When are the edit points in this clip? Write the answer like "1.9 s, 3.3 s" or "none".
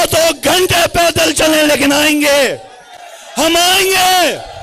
none